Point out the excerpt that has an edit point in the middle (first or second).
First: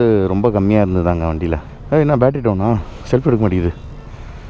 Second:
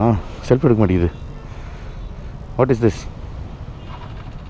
first